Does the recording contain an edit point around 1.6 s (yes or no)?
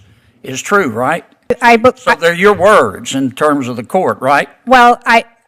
yes